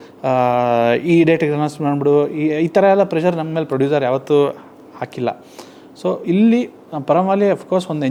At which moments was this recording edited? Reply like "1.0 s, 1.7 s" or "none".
none

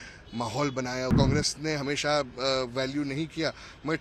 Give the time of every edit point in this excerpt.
1.1 s

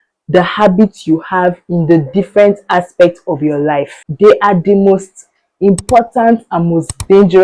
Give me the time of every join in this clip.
4.1 s

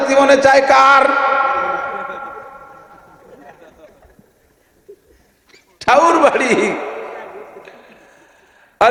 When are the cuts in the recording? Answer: none

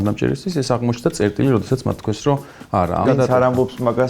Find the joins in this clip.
3.0 s

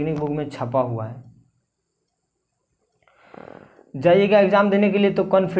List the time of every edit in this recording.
none

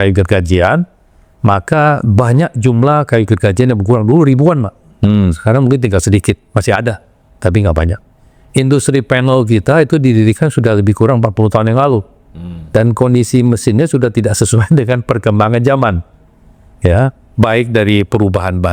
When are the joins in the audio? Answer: none

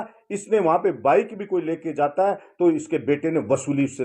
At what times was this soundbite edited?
none

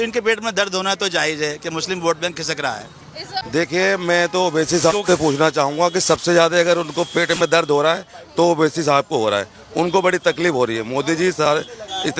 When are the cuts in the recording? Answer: 3.4 s

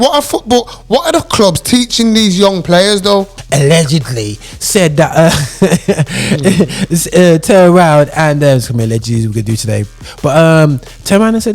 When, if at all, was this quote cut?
3.4 s

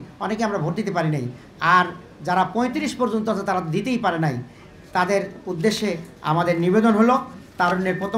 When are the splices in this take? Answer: none

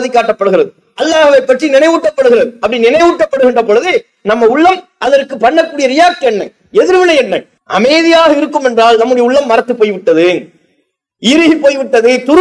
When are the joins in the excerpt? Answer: 7.5 s

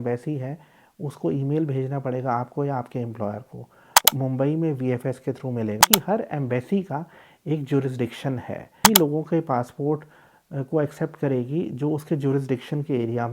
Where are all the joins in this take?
4.1 s, 5.8 s, 8.8 s

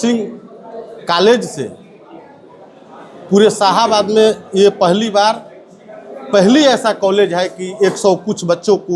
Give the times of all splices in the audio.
none

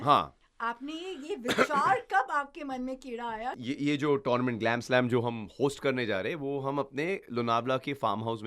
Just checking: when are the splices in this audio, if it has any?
3.6 s

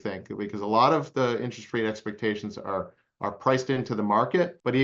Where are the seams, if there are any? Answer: none

